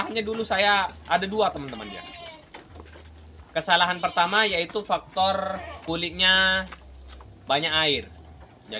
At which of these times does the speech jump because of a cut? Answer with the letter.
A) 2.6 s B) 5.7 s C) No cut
B